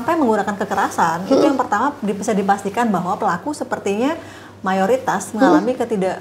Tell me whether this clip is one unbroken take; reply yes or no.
yes